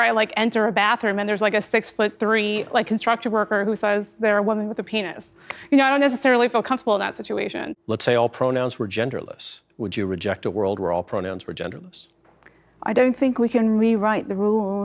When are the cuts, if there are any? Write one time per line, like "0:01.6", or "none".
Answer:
0:07.7